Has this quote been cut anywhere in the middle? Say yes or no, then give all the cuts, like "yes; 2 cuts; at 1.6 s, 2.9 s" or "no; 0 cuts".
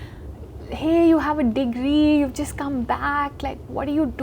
no; 0 cuts